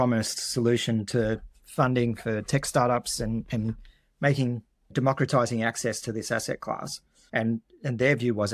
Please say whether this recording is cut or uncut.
uncut